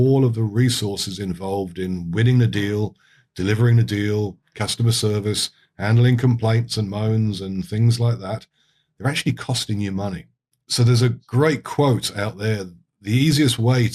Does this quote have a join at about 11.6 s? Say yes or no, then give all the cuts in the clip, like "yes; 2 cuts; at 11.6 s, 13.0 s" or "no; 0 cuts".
no; 0 cuts